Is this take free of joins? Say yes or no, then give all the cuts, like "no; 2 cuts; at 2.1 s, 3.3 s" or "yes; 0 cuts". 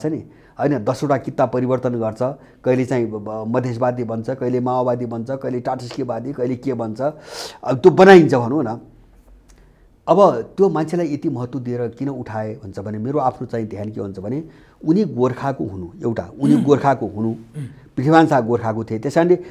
yes; 0 cuts